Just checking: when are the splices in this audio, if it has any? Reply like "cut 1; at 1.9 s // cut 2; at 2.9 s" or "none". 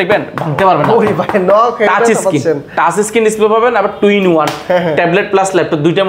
none